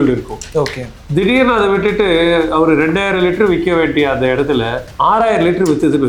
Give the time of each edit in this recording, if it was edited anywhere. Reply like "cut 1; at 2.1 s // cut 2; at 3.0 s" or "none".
cut 1; at 4.8 s